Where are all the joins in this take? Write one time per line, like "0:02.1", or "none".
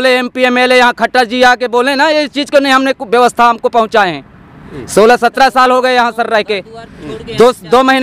none